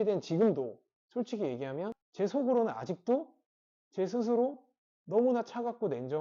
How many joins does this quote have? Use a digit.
1